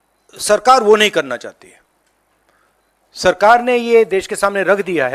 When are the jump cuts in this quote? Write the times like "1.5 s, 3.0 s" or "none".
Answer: none

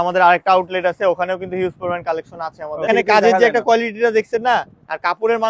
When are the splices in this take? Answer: 2.9 s

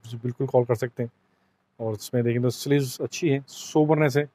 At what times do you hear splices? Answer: none

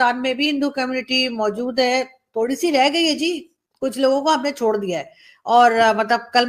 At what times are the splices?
none

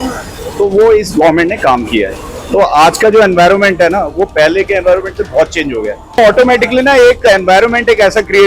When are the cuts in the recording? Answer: none

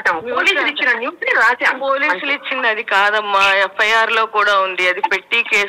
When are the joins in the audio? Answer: none

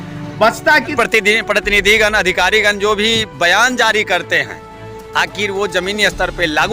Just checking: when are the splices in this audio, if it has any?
0.9 s

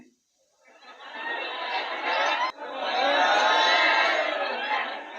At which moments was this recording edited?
2.5 s

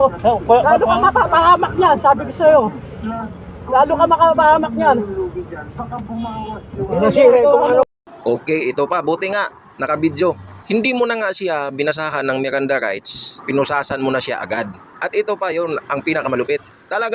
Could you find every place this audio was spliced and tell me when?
none

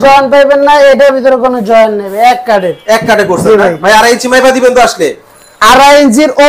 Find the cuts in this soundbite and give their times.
none

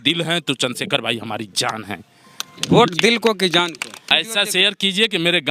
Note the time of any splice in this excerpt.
4.1 s

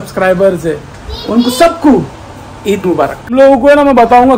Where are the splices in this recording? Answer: 3.3 s

